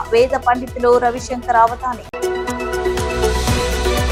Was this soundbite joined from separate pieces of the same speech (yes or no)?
no